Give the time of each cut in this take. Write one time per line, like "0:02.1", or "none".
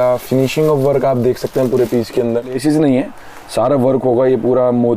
0:02.6